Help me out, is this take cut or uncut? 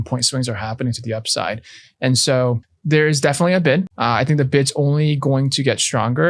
cut